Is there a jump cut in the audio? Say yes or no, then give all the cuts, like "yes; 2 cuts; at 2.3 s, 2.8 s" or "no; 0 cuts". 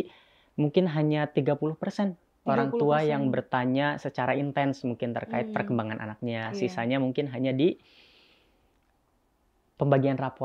no; 0 cuts